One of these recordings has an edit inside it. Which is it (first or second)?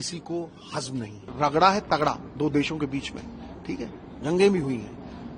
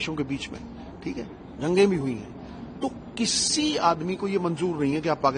first